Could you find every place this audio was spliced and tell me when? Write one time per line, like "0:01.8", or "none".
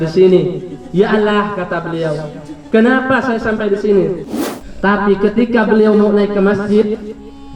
0:04.2